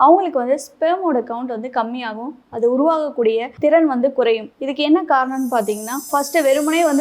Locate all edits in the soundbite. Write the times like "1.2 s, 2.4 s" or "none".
6.1 s

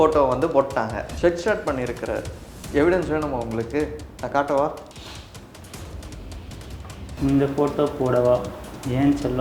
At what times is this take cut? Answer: 1.1 s

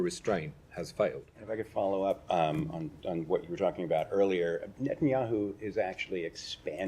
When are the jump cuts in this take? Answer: 1.3 s

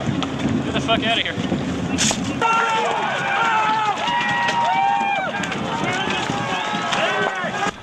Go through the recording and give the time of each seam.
3.5 s

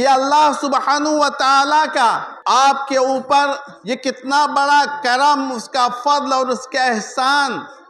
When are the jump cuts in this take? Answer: 2.3 s, 3.7 s

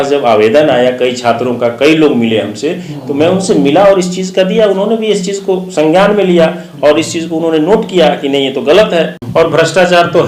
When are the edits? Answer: 9.2 s

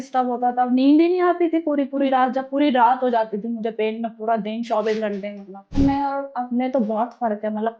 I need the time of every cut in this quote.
5.8 s

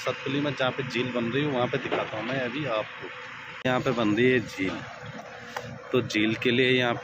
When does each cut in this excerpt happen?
3.7 s

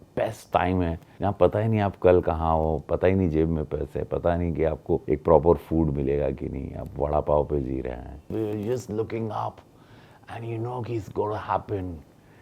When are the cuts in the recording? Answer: 1.1 s, 5.0 s, 8.3 s

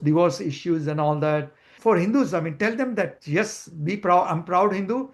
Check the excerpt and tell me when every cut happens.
1.7 s

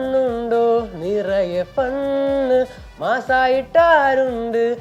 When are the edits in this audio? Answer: none

